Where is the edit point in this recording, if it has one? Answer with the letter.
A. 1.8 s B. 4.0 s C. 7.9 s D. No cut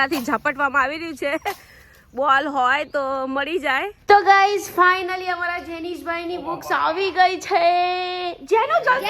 B